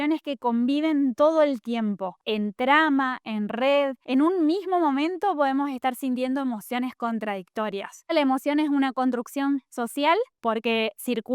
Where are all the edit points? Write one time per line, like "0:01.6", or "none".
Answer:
0:02.1
0:04.0
0:08.1